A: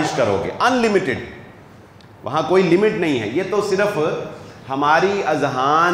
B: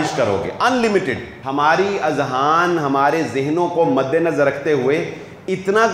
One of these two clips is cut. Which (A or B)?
B